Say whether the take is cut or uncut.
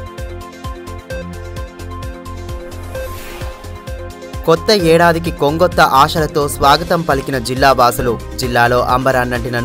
cut